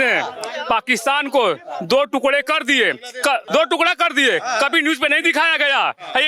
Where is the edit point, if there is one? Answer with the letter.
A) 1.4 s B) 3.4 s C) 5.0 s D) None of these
B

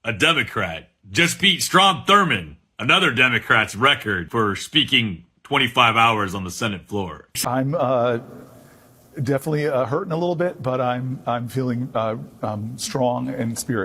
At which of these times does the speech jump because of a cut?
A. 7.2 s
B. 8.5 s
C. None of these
A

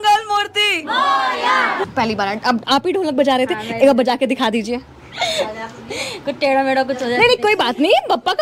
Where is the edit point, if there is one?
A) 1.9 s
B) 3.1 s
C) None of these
A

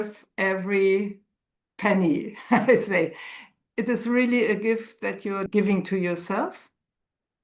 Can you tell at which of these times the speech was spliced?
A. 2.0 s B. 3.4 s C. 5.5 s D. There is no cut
C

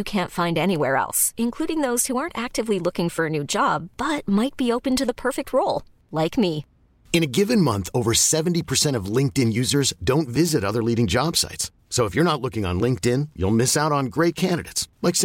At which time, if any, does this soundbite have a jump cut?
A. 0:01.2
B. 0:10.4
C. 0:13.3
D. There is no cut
D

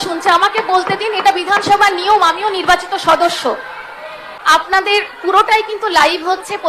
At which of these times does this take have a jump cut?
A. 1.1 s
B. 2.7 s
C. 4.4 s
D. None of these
C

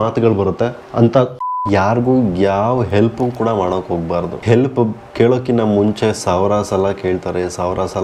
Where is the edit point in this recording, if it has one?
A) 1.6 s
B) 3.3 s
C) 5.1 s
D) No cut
A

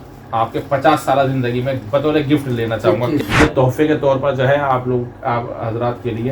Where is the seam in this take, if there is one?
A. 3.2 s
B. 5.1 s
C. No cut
A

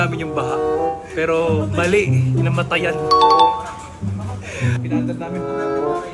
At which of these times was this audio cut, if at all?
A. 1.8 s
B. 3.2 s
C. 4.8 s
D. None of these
C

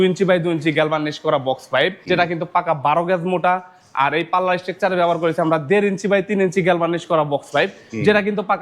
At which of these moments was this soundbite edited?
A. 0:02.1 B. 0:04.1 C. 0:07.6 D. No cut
A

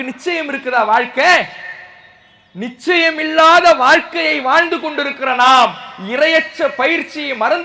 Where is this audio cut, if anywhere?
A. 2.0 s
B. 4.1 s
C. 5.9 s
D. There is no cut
D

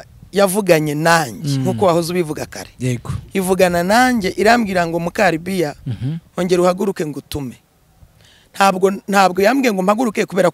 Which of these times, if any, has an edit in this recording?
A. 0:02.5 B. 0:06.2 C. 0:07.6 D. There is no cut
D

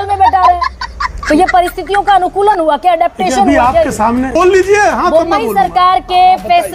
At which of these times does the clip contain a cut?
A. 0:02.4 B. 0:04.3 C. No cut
B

